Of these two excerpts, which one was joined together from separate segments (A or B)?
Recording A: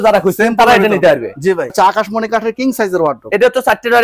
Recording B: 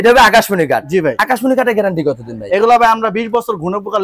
A